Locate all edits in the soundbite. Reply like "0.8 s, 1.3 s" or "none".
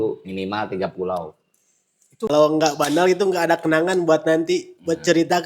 2.3 s